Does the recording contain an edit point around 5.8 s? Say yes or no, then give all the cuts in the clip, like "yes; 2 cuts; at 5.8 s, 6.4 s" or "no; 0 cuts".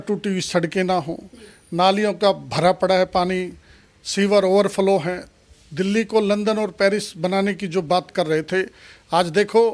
no; 0 cuts